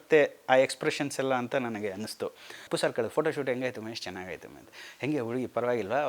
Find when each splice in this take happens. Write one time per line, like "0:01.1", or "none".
0:02.6